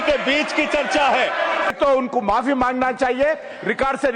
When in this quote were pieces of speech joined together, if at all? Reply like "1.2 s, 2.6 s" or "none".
1.7 s

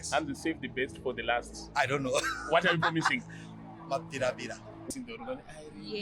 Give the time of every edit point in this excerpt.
4.9 s

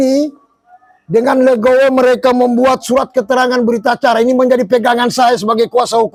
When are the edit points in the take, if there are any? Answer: none

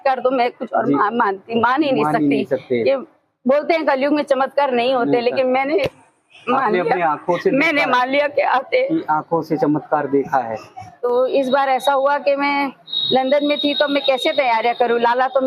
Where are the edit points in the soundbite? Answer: 10.9 s

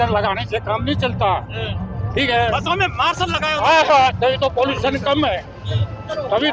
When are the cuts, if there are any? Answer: none

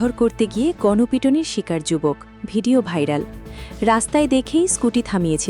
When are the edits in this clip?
none

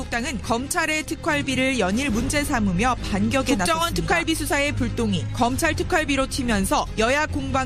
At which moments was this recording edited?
none

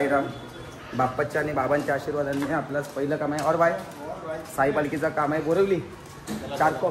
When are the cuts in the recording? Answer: none

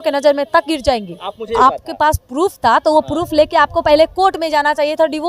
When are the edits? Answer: 1.5 s

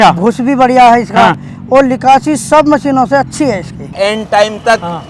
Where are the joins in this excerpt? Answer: 3.9 s

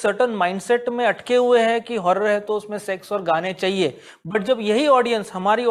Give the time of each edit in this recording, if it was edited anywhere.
none

